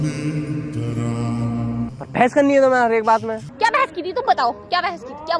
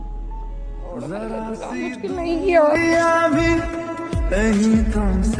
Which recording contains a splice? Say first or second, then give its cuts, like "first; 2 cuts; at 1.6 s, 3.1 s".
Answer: first; 2 cuts; at 1.9 s, 3.5 s